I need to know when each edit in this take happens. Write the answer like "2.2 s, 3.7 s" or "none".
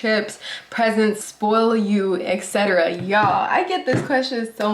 none